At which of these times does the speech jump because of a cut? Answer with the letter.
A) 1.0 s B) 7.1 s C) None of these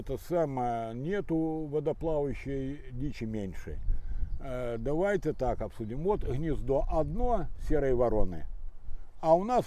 C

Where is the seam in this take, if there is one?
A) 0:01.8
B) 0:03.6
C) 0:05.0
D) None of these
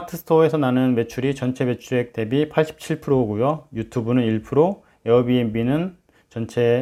D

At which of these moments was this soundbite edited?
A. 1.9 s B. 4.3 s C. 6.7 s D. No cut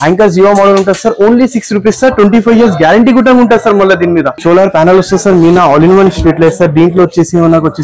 B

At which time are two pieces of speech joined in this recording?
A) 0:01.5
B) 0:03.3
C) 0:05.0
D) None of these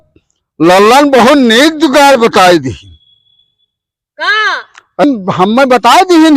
C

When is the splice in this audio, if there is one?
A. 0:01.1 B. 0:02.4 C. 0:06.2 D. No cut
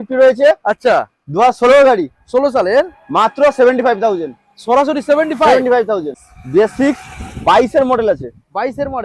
C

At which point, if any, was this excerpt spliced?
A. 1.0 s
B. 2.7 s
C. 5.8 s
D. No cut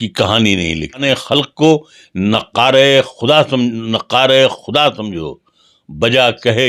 A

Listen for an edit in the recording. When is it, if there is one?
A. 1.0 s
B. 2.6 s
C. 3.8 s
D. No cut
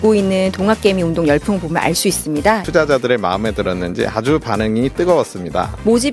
B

